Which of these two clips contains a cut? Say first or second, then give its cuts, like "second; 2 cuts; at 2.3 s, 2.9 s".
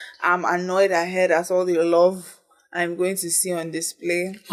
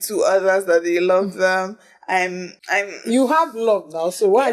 second; 1 cut; at 2.5 s